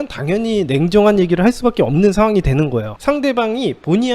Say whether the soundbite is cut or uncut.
cut